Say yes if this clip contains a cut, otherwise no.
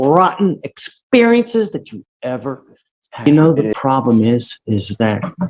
yes